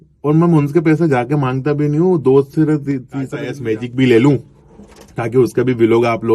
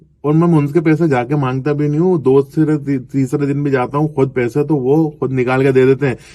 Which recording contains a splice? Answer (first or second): first